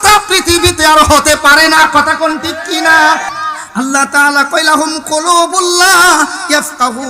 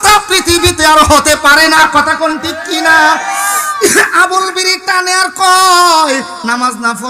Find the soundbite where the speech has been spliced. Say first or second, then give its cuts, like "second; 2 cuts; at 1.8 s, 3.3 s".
first; 1 cut; at 3.3 s